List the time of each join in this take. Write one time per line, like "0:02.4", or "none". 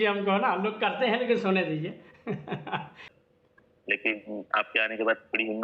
0:03.2